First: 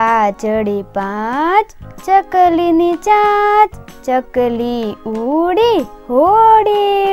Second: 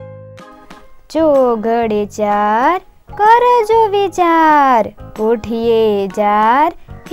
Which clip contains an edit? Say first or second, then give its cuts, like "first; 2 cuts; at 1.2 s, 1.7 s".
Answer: second; 1 cut; at 1.0 s